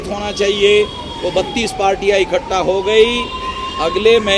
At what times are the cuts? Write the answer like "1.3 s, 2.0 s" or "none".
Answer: none